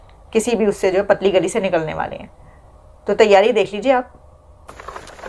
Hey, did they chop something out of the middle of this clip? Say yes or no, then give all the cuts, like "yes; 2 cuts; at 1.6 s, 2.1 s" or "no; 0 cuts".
no; 0 cuts